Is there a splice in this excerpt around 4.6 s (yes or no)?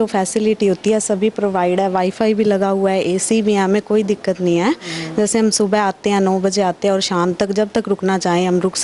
no